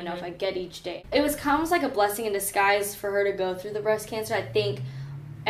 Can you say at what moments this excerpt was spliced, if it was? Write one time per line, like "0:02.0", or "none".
0:01.1